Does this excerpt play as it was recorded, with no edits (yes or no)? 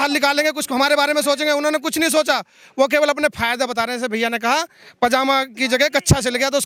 yes